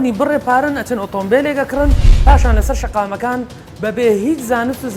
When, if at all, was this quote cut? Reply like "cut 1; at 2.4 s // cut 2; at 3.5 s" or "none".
none